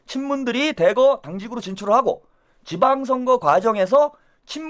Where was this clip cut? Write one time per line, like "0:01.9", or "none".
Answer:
none